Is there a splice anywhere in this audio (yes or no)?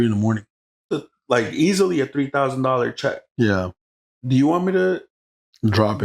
yes